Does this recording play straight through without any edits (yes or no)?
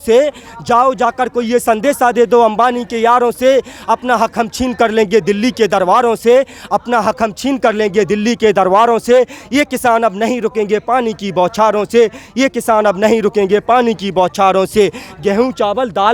yes